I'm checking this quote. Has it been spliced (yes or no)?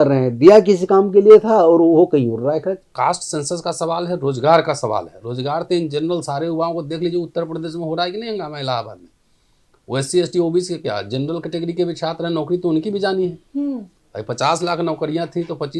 yes